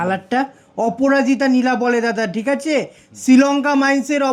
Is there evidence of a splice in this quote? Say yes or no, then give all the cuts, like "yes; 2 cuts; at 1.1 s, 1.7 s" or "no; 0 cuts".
no; 0 cuts